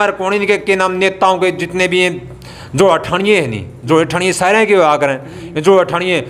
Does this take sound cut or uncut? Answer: uncut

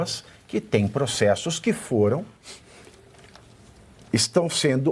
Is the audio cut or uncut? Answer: uncut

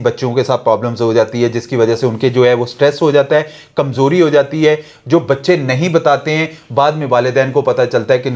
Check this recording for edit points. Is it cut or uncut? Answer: uncut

